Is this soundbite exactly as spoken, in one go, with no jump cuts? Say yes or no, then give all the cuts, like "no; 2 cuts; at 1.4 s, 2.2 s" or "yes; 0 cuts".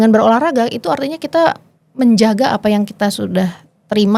yes; 0 cuts